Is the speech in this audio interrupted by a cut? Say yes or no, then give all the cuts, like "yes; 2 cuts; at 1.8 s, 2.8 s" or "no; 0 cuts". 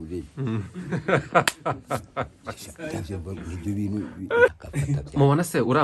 yes; 1 cut; at 4.6 s